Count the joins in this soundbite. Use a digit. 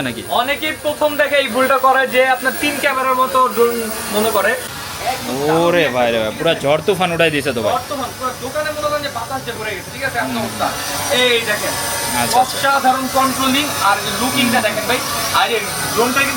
1